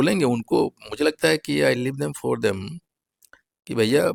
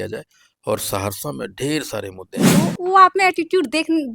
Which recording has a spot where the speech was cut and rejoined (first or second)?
second